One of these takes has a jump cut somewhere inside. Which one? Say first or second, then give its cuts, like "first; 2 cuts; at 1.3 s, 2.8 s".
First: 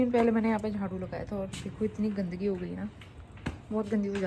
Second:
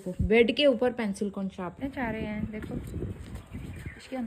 second; 1 cut; at 1.8 s